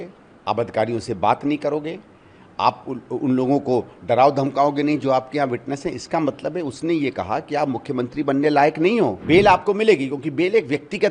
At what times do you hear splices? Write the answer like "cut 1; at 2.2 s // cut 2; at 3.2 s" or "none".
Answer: cut 1; at 9.2 s